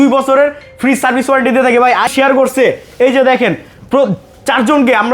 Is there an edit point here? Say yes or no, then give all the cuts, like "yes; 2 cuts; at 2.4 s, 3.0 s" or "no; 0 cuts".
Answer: yes; 1 cut; at 2.1 s